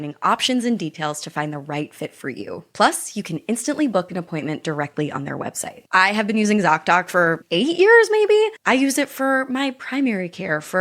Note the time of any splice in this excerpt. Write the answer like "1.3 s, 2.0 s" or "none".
5.7 s, 7.4 s